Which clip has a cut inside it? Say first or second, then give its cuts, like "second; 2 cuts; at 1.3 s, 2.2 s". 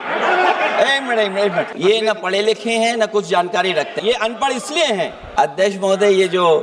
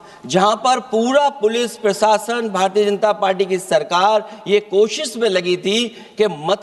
first; 3 cuts; at 1.7 s, 3.9 s, 5.2 s